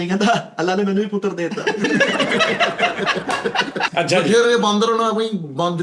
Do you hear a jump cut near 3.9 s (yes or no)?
yes